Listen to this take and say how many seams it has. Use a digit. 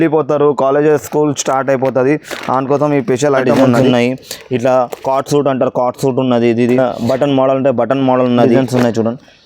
3